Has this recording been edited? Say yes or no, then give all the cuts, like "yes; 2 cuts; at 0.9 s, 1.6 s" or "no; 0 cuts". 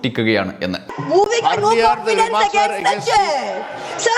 yes; 1 cut; at 0.9 s